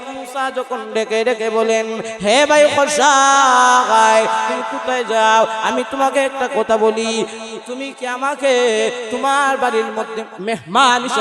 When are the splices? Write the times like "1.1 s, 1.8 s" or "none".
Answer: 10.3 s

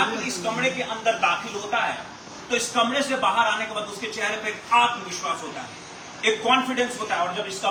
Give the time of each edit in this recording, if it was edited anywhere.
none

